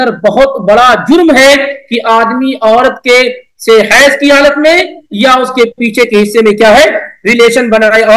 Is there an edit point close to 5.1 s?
no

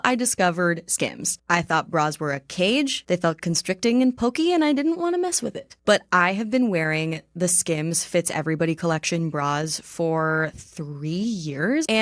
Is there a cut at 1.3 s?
no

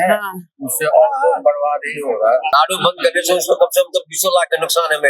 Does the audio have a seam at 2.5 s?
yes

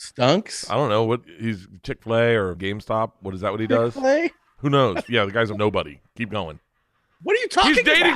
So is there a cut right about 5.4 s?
yes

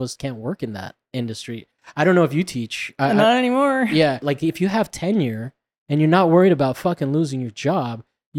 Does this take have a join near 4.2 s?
yes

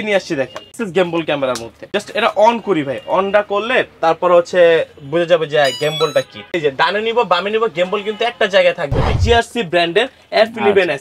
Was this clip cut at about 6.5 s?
yes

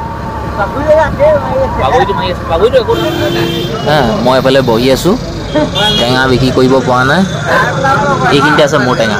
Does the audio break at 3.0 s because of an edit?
yes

